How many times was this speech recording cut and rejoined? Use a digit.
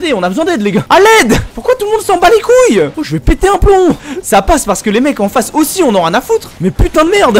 2